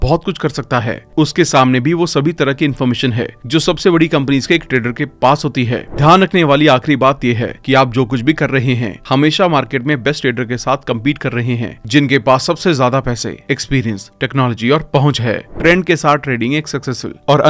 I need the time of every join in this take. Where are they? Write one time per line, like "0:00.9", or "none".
0:05.9
0:15.5